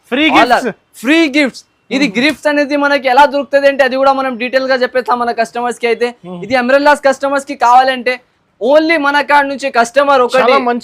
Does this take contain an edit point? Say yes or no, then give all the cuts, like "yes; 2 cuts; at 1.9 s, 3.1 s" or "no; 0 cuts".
no; 0 cuts